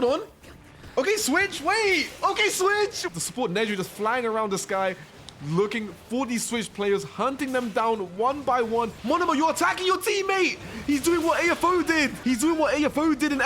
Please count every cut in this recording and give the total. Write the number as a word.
three